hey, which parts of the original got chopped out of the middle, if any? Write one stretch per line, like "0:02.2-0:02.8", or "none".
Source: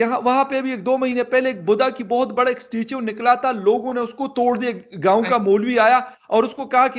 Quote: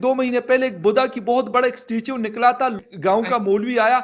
0:03.6-0:04.7